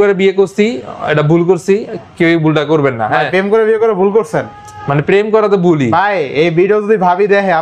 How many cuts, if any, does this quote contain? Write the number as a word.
zero